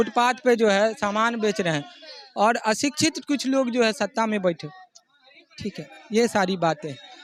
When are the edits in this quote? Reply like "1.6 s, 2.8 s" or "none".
none